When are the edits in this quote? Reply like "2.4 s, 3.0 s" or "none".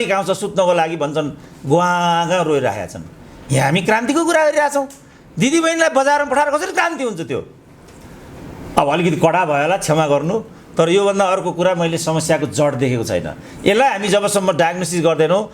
none